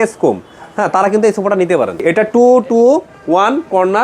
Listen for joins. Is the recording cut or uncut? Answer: cut